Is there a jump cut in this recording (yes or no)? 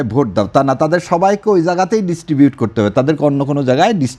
no